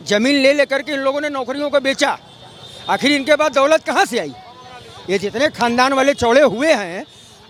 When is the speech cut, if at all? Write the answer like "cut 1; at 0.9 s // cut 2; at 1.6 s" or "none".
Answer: none